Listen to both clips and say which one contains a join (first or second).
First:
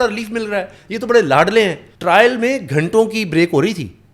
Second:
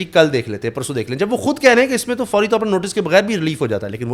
first